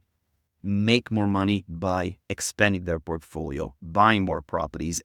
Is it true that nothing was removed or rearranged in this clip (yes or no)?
yes